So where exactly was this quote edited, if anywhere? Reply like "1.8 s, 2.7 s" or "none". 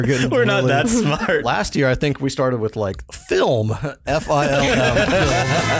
1.5 s